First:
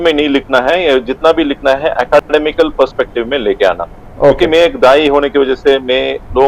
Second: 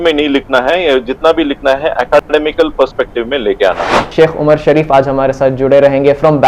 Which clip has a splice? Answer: second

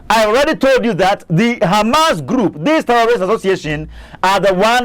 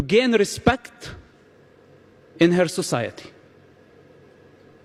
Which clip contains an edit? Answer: first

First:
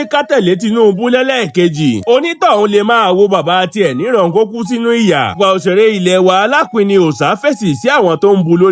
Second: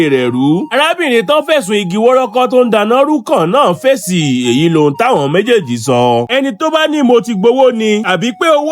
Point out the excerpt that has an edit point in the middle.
second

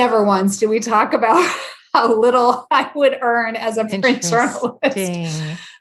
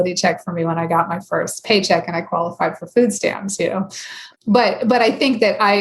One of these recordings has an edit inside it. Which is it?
second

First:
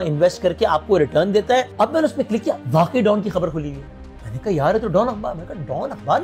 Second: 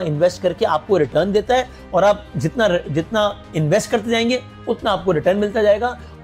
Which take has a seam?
first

